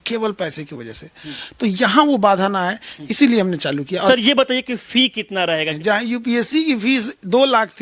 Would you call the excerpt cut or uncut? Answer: cut